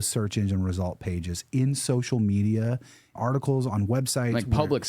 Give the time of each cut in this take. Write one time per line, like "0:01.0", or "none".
0:03.2